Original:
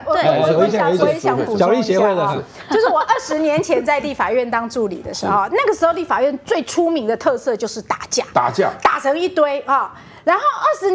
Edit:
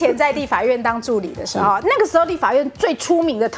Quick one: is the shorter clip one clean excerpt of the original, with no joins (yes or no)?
yes